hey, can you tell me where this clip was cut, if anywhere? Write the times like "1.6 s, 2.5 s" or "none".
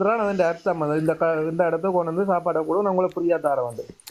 none